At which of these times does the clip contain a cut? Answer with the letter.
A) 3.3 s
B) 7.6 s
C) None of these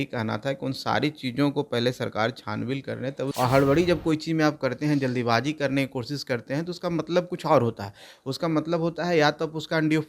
A